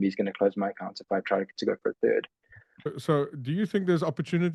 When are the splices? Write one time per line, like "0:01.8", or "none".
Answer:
0:02.9